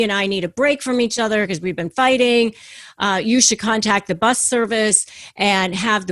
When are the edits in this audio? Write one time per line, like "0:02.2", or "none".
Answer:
none